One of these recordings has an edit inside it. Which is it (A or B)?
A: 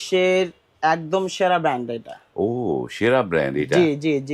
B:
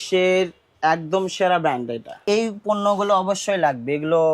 B